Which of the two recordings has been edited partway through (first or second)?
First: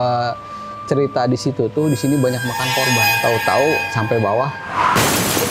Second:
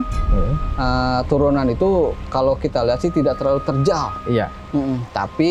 first